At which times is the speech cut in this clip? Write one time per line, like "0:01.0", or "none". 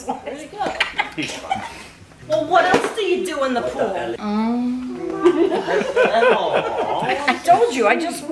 none